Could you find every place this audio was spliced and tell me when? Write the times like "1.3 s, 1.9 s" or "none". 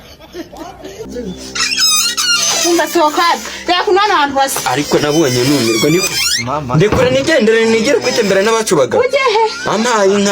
0.9 s